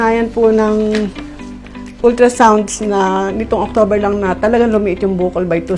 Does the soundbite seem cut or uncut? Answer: uncut